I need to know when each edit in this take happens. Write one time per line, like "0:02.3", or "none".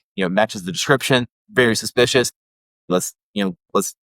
0:01.4